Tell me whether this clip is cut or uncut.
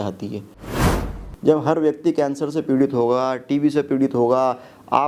cut